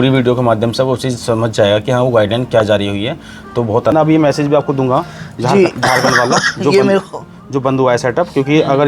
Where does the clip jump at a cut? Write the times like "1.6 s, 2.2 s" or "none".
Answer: 3.9 s